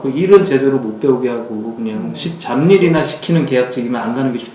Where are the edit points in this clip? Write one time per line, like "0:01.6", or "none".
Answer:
none